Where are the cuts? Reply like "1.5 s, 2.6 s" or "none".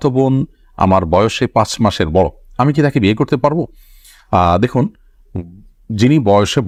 none